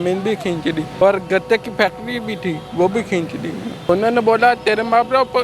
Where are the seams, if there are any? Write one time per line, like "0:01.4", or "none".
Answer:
0:00.9
0:03.9

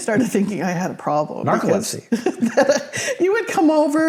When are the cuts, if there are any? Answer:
none

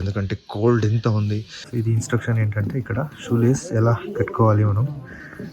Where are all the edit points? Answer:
0:01.8

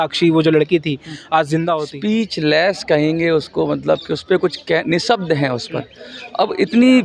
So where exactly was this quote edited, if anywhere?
0:01.9

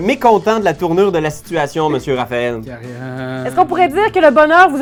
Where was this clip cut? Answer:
none

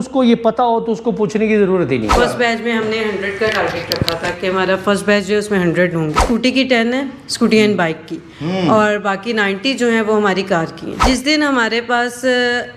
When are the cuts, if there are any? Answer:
0:02.1
0:06.2
0:11.0

